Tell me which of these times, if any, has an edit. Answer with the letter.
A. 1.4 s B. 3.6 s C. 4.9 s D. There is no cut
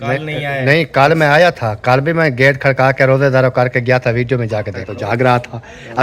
C